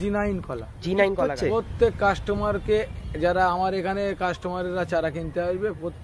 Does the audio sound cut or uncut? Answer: cut